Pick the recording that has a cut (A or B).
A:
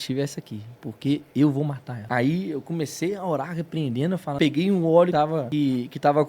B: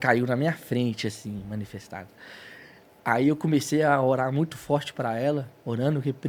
A